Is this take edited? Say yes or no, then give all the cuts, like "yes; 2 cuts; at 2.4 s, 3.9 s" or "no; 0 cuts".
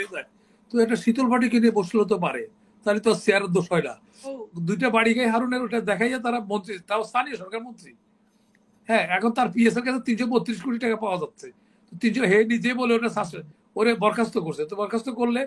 yes; 1 cut; at 4.5 s